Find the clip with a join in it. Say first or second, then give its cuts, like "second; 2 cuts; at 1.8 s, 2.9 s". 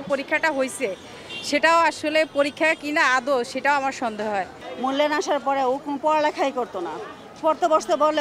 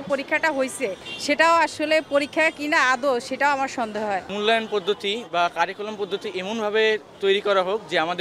second; 2 cuts; at 1.1 s, 4.3 s